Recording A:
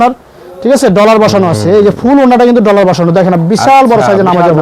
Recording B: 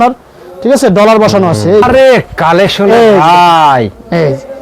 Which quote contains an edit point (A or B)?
B